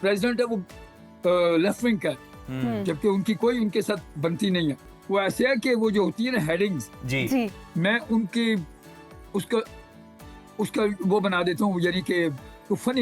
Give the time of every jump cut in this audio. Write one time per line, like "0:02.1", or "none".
0:04.9